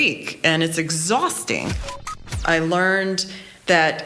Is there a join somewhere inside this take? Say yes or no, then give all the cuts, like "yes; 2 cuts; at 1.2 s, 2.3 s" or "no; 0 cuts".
yes; 1 cut; at 2.2 s